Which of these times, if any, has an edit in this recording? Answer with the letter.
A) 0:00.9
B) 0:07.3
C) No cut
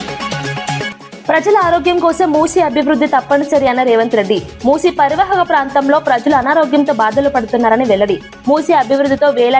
A